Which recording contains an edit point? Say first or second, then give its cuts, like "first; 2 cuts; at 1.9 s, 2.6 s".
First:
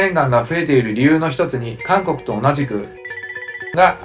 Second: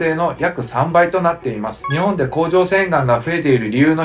second; 1 cut; at 1.8 s